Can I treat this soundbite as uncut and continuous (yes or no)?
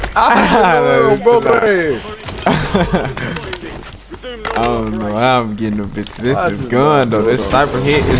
yes